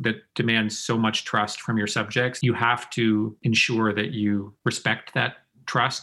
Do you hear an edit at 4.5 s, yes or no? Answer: yes